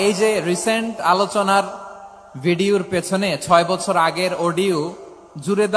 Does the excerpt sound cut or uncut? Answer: uncut